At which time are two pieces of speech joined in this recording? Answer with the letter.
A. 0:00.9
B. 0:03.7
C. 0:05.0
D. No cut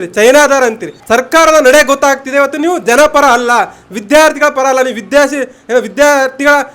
A